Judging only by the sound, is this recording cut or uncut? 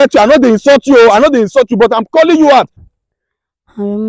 cut